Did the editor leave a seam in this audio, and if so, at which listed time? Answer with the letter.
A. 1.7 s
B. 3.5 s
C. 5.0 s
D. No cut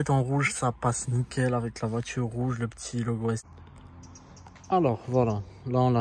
B